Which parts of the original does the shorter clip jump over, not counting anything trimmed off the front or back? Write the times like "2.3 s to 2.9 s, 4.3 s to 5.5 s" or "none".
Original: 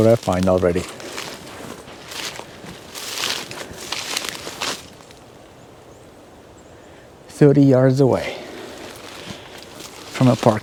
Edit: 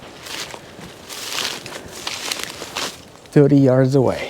5.1 s to 7.3 s